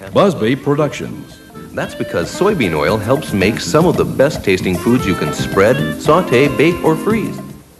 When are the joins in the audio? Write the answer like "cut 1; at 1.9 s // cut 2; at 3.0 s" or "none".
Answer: none